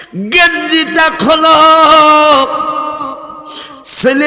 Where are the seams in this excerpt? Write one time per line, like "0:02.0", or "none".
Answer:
none